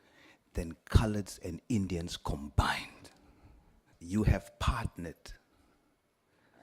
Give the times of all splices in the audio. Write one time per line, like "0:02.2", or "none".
0:03.9